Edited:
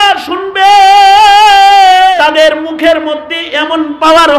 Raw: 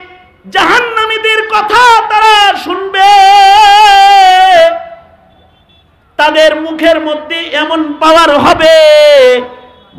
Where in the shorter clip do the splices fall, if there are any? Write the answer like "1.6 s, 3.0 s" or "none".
2.2 s